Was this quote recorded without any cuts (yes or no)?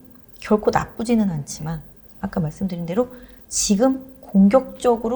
yes